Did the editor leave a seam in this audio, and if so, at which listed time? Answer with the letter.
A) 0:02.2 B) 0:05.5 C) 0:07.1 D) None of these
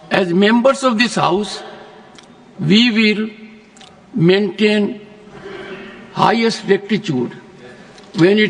D